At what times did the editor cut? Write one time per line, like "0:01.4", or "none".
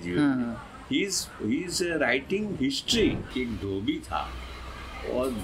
0:03.3